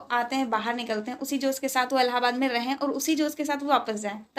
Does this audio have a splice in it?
no; 0 cuts

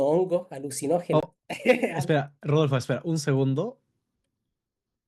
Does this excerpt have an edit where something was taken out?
no; 0 cuts

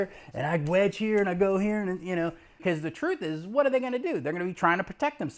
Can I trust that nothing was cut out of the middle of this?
no; 1 cut; at 2.6 s

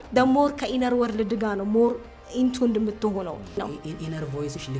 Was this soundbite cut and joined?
yes; 1 cut; at 3.6 s

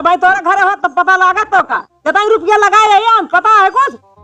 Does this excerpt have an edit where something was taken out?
no; 0 cuts

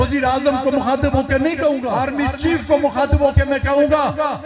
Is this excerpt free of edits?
no; 1 cut; at 1.9 s

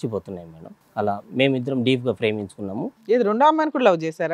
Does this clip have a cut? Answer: no; 0 cuts

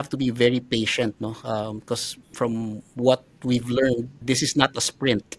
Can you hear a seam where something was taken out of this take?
no; 0 cuts

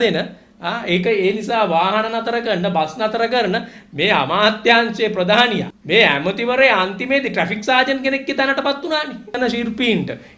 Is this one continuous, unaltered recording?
no; 1 cut; at 9.3 s

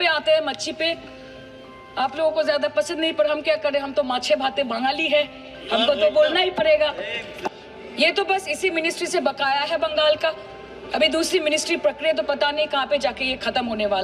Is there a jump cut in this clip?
yes; 1 cut; at 7.4 s

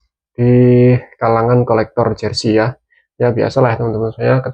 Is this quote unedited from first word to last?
yes; 0 cuts

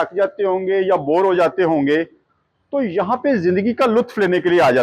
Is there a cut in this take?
no; 0 cuts

